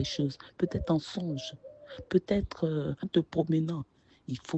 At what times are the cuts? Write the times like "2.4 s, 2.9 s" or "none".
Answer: 3.0 s